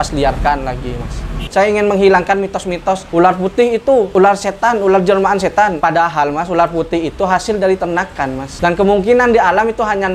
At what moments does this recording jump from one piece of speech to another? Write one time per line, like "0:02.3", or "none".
0:01.5
0:03.0
0:04.1
0:05.8
0:08.5